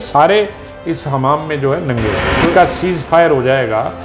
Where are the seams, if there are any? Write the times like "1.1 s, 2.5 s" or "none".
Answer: 2.4 s

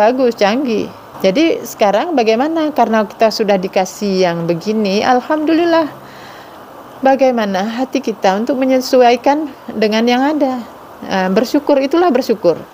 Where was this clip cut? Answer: 1.0 s

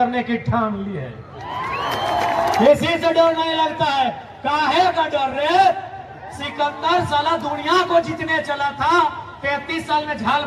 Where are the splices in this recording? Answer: 2.6 s

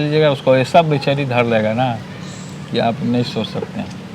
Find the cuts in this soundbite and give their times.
none

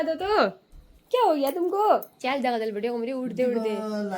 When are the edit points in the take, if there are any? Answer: 2.1 s

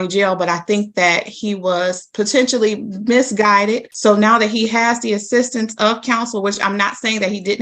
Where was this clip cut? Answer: 3.9 s

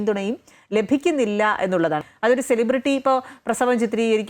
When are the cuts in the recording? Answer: 2.0 s

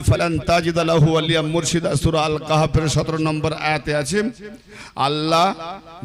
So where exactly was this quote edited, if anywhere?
none

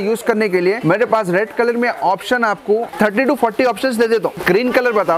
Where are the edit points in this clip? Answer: 0.8 s, 2.9 s, 4.4 s

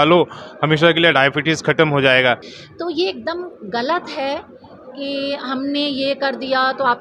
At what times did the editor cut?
2.5 s

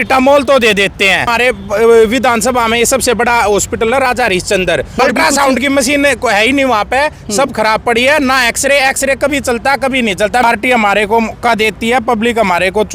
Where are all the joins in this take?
1.3 s, 5.0 s, 10.4 s

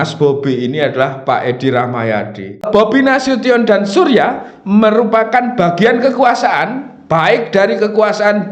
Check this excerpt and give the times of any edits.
2.7 s

